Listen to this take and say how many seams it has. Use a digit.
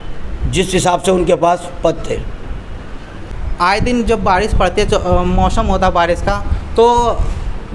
1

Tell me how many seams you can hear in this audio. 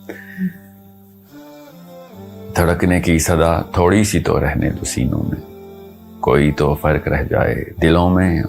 0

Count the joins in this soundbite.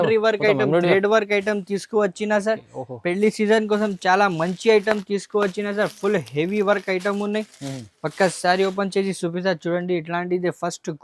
0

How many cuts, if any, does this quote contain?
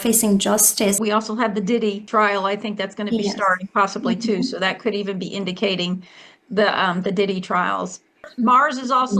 3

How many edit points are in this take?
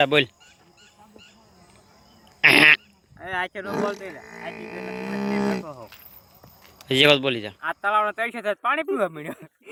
0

